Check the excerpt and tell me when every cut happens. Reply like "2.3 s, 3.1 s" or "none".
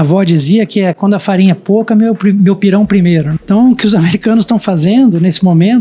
3.3 s